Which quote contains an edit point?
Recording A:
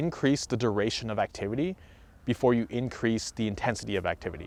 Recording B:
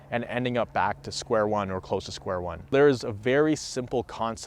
B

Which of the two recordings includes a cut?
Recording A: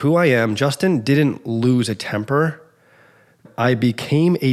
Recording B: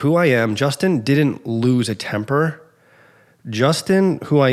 A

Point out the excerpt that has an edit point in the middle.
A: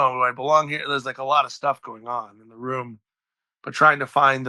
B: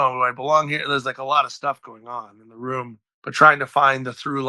B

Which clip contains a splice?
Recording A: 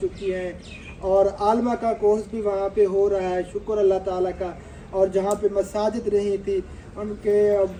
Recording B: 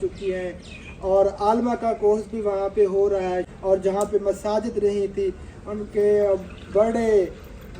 B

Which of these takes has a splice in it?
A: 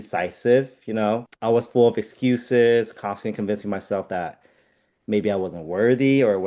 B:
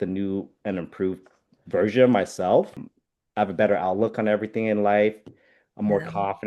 A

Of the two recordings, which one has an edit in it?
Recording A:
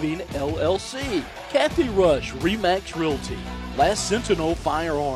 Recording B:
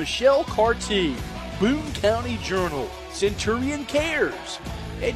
A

